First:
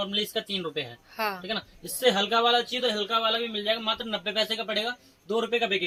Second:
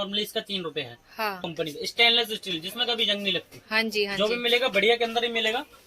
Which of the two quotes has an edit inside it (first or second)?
second